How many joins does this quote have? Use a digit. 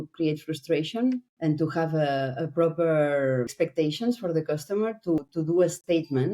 3